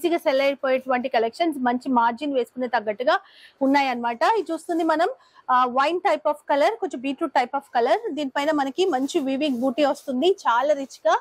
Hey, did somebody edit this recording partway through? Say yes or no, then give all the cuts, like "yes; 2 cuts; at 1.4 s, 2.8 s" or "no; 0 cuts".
no; 0 cuts